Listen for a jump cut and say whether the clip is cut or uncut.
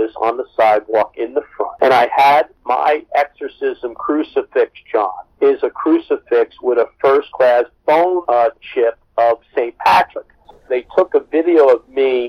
cut